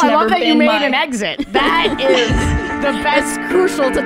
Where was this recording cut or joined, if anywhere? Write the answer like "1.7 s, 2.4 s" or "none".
2.7 s